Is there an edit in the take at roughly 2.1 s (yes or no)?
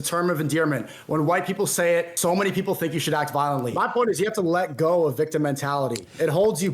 yes